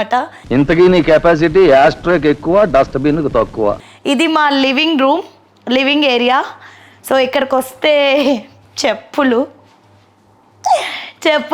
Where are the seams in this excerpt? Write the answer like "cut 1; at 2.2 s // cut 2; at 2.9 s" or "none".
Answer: none